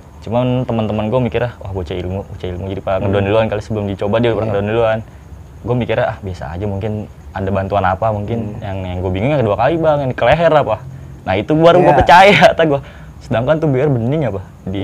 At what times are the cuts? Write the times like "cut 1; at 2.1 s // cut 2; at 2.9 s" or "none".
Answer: none